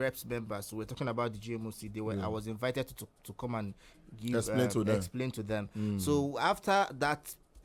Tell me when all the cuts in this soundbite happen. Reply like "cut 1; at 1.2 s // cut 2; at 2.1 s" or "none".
none